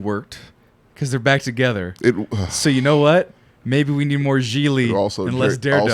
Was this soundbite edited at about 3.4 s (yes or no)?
no